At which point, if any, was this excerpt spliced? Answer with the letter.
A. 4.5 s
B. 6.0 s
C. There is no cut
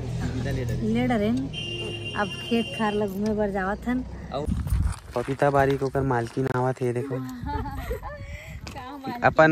A